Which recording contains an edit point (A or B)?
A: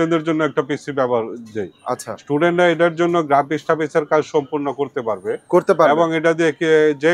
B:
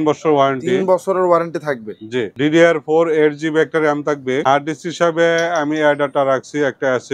B